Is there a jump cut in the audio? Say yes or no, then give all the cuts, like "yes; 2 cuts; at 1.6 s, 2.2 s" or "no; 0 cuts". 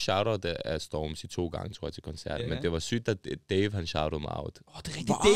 no; 0 cuts